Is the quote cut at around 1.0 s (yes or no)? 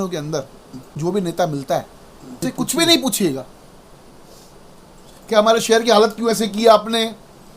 yes